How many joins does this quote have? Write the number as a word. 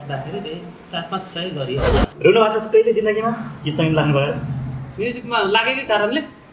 one